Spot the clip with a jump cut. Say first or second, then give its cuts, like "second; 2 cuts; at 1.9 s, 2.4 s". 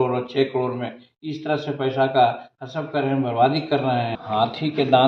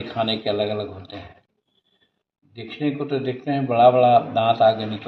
first; 1 cut; at 4.2 s